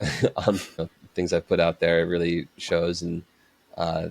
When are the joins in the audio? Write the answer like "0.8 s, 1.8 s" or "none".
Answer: 0.9 s